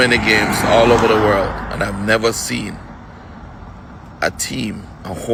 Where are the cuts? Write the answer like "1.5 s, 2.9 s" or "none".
none